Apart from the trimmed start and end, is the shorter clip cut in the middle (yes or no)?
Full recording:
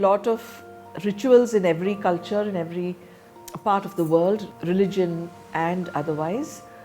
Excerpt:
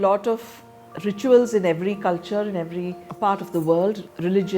yes